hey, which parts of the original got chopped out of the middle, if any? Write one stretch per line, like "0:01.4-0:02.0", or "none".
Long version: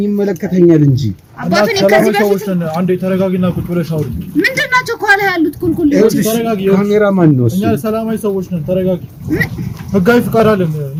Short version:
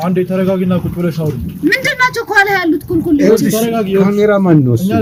none